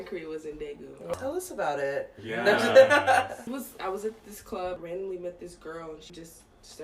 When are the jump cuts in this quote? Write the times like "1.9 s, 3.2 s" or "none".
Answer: 3.5 s